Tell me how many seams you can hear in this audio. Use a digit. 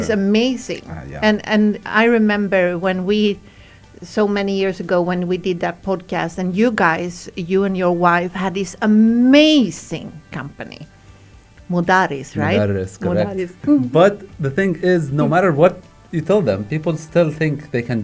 1